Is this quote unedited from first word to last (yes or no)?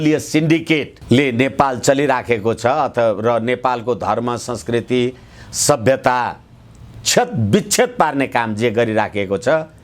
no